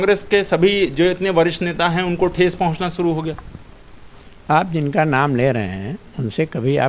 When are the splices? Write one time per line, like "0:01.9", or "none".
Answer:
none

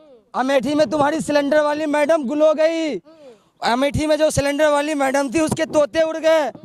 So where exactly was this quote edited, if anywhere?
none

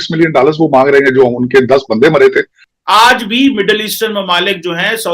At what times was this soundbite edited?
0:02.6

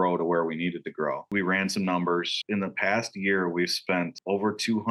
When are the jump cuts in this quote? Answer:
0:01.3

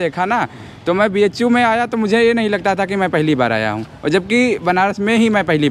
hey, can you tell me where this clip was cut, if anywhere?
none

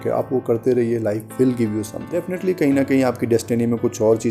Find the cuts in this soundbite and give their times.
0:02.3

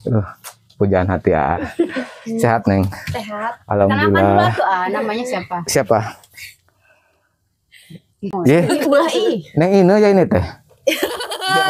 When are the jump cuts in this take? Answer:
0:08.3

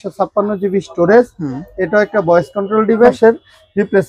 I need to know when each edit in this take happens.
0:03.2

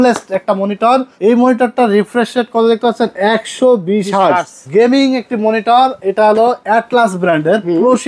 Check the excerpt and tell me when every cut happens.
0:01.1
0:04.6

